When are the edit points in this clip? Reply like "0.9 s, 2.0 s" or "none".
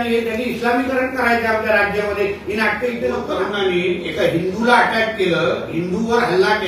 3.3 s